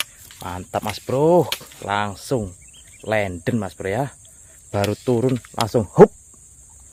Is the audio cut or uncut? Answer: uncut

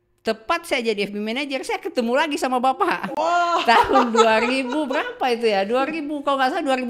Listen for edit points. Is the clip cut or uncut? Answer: uncut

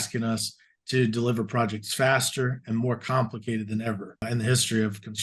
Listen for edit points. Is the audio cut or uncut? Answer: cut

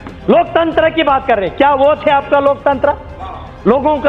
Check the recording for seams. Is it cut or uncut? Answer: uncut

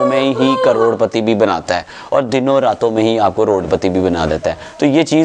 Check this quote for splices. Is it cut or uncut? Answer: uncut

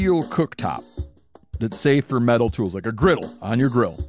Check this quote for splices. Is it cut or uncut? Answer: uncut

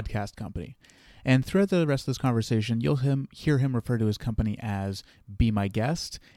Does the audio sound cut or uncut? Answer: uncut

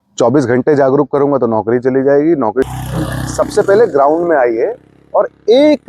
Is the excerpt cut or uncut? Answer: cut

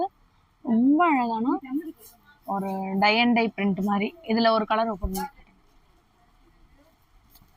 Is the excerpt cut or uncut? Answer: uncut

